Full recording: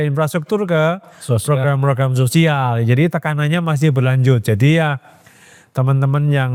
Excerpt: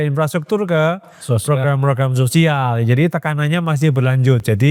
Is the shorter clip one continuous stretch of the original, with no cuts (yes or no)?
yes